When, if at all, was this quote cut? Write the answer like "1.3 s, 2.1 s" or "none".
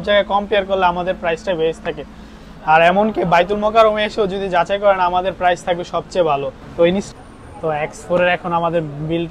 7.1 s